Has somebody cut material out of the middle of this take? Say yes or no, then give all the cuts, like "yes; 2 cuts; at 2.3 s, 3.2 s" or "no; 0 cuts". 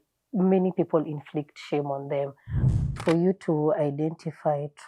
yes; 1 cut; at 2.8 s